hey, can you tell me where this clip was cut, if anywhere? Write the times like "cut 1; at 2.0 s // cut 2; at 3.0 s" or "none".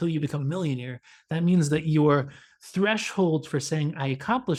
none